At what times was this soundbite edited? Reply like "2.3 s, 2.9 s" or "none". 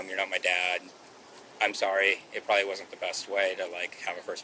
none